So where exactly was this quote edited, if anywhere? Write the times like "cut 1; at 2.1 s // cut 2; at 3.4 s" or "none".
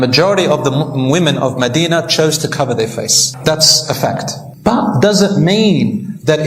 none